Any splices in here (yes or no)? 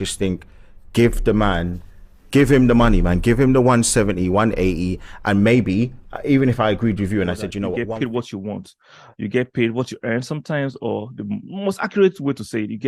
yes